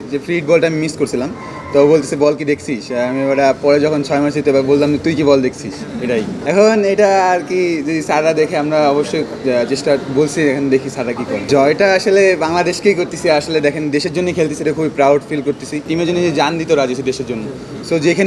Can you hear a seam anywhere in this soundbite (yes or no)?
yes